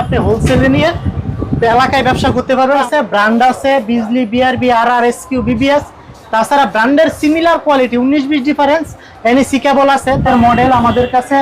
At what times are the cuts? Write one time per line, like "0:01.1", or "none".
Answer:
0:02.8
0:10.2